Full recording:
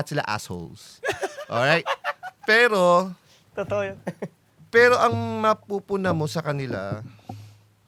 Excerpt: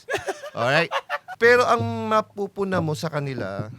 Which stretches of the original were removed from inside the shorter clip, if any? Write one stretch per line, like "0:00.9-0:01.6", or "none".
0:02.2-0:04.5